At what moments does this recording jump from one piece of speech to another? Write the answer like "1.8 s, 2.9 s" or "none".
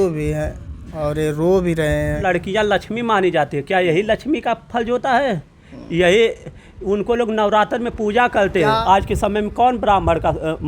2.2 s, 8.8 s

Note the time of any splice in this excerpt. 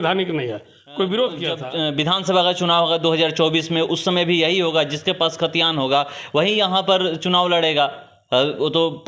1.6 s

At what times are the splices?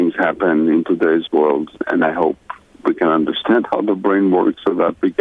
1.8 s

